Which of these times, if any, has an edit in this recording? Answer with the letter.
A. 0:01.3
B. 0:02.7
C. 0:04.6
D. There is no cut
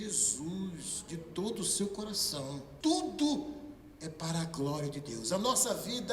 B